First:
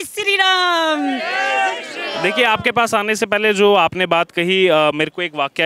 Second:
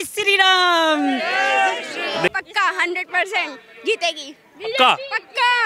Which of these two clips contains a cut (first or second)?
second